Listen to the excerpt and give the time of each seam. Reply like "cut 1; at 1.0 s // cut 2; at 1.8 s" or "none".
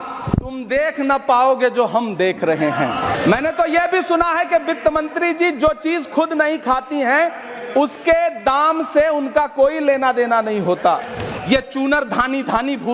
cut 1; at 3.2 s // cut 2; at 11.3 s